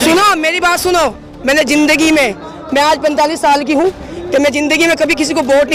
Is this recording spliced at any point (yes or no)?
no